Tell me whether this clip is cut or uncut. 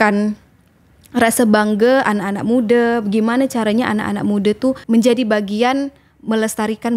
cut